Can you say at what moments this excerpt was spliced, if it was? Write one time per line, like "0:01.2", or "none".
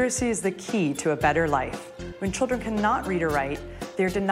none